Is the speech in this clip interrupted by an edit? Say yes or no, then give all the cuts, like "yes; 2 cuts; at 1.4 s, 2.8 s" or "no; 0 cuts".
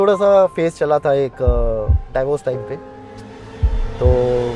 no; 0 cuts